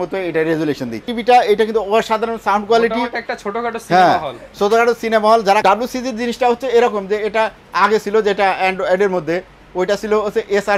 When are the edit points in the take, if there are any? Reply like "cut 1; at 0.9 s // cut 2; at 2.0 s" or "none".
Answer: cut 1; at 1.1 s // cut 2; at 5.6 s